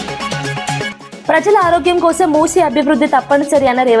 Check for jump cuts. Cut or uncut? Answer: cut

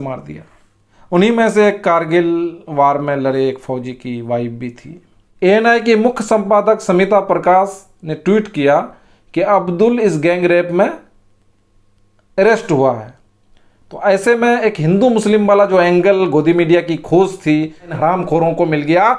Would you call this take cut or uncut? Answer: cut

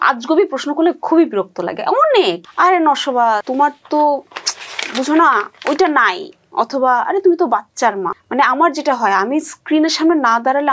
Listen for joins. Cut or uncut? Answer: cut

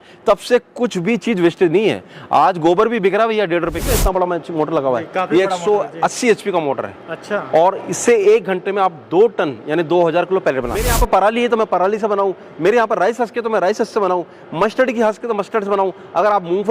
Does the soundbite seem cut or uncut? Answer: cut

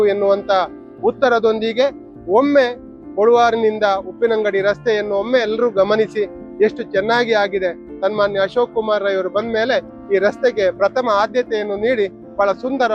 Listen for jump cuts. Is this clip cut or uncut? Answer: uncut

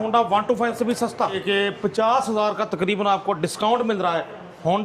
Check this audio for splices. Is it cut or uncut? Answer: cut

